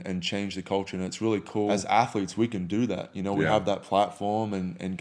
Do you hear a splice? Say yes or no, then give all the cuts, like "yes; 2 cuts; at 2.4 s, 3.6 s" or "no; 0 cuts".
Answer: yes; 1 cut; at 1.7 s